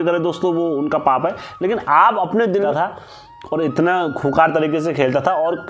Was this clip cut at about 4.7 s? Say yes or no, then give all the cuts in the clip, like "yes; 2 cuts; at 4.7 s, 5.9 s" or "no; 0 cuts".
no; 1 cut; at 2.7 s